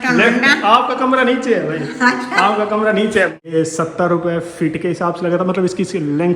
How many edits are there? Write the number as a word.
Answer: one